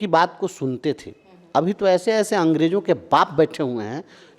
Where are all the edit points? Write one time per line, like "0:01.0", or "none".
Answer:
none